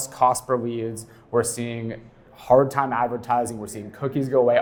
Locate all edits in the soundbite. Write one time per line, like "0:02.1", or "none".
none